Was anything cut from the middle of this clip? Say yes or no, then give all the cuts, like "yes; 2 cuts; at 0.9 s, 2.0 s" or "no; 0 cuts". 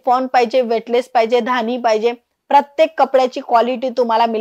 no; 0 cuts